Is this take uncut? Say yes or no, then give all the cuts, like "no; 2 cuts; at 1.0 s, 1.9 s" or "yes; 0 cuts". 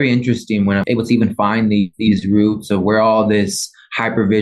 no; 2 cuts; at 0.8 s, 1.9 s